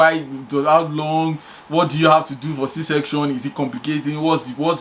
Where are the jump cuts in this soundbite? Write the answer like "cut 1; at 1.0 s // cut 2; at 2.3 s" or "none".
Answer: none